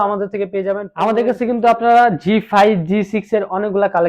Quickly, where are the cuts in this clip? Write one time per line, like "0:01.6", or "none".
0:00.9